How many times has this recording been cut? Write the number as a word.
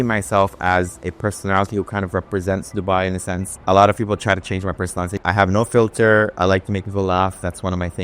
two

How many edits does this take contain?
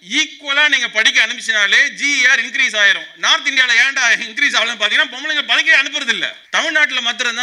one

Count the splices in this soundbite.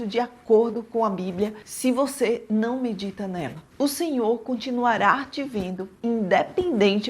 one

